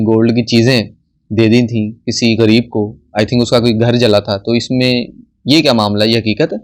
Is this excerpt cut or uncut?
uncut